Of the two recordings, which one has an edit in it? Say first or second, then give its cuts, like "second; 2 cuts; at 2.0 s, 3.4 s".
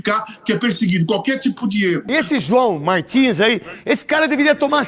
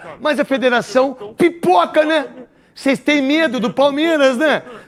first; 1 cut; at 2.0 s